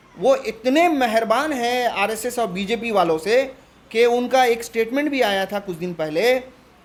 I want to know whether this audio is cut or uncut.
uncut